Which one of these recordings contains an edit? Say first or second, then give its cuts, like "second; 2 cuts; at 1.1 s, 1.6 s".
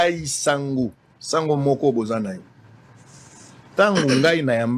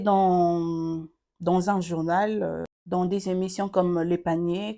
second; 1 cut; at 2.7 s